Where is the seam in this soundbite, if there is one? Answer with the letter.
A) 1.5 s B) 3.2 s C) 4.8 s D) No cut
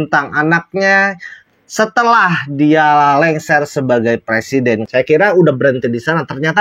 C